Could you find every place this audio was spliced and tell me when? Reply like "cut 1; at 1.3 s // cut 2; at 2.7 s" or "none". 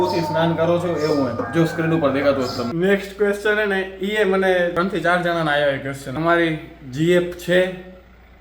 cut 1; at 2.7 s // cut 2; at 4.7 s // cut 3; at 6.1 s